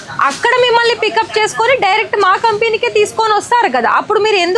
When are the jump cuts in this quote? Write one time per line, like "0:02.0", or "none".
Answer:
none